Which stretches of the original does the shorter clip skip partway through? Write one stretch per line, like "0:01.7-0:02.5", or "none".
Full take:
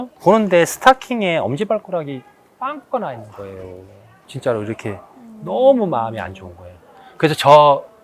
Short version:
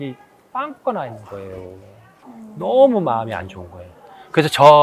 0:04.3-0:05.1